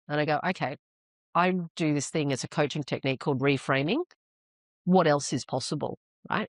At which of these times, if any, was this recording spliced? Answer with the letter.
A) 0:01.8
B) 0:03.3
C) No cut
C